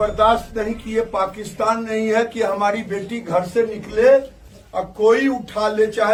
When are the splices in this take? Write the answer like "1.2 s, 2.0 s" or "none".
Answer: none